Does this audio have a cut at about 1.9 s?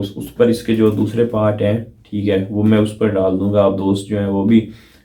no; 0 cuts

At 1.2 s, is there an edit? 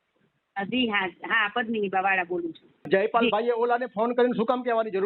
no; 1 cut; at 2.7 s

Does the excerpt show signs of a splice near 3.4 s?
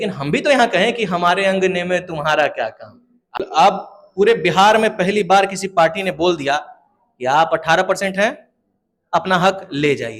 yes; 1 cut; at 3.4 s

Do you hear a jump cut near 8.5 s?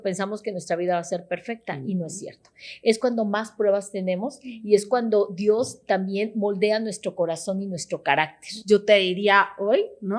yes; 1 cut; at 8.5 s

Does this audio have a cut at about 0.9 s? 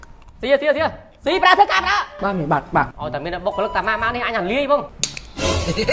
no; 2 cuts; at 3.0 s, 4.9 s

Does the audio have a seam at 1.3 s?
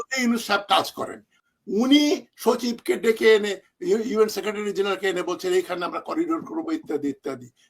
yes; 1 cut; at 1.3 s

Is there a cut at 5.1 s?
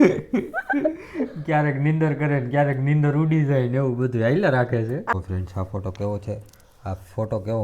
yes; 1 cut; at 5.1 s

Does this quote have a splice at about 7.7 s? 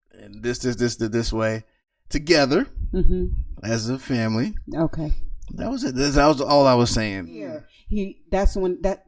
yes; 1 cut; at 7.7 s

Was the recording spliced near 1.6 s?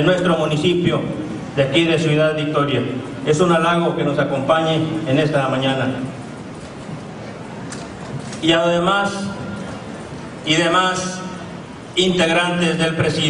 yes; 1 cut; at 1.6 s

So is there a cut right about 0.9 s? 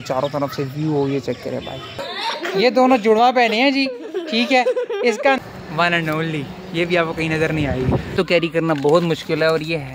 no; 3 cuts; at 2.1 s, 5.4 s, 8.1 s

